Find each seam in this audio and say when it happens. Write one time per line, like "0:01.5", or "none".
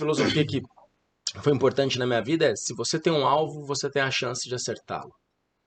none